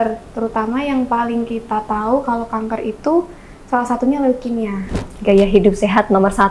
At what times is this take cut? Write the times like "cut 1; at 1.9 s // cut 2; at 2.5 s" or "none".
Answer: cut 1; at 5.1 s